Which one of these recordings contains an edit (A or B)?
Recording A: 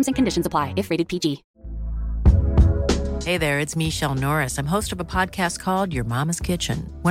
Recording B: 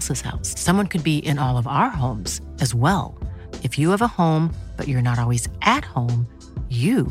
A